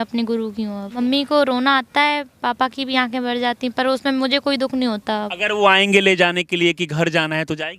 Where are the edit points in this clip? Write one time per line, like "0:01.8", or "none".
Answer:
0:01.0
0:05.3

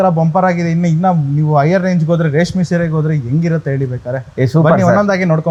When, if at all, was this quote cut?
none

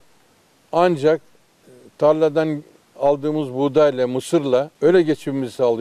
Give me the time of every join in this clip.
0:04.7

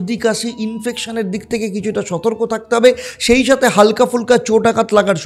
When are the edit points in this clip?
none

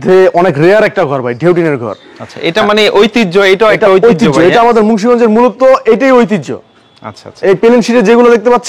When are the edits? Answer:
none

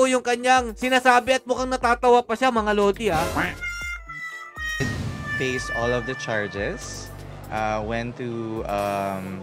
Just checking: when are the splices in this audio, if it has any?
none

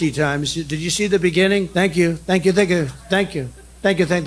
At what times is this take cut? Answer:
0:01.7

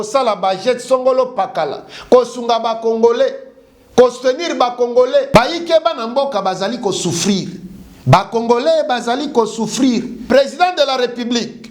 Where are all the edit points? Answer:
0:05.3
0:10.1

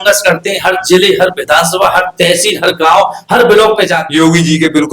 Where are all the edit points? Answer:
0:04.0

